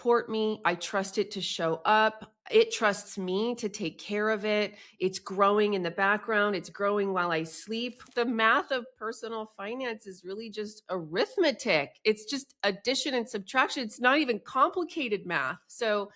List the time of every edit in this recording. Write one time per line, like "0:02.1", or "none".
0:08.1

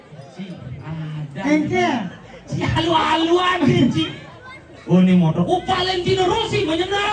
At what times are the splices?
0:02.7

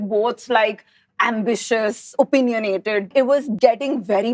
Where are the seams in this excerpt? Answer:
0:03.2

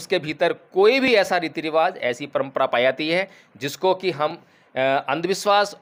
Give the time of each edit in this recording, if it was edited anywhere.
none

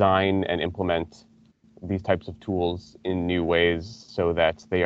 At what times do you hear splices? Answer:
none

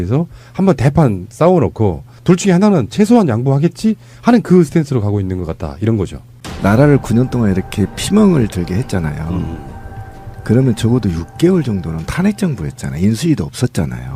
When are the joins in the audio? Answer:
0:06.2

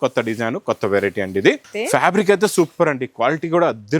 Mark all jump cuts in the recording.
0:01.7

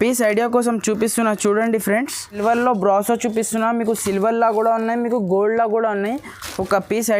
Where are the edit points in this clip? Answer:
0:02.4

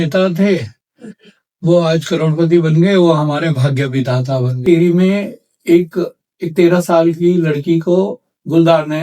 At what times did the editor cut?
0:04.6

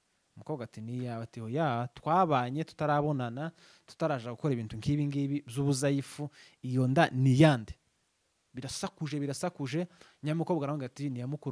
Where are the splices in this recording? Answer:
none

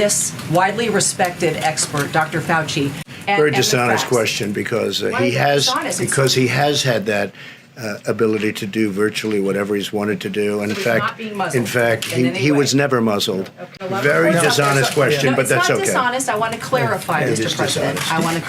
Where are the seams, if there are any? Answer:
0:03.0
0:13.8

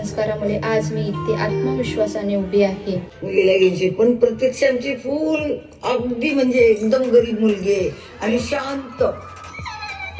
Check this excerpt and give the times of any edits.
0:03.1

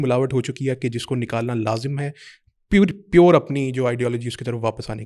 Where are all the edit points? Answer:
none

